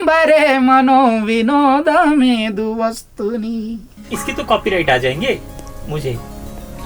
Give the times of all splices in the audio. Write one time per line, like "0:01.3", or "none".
0:04.1